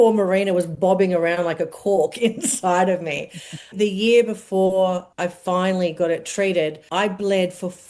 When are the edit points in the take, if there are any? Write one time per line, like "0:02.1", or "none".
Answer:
0:03.7
0:05.1
0:06.8